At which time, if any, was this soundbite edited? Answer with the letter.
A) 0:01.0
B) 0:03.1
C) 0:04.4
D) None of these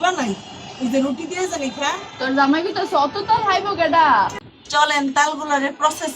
C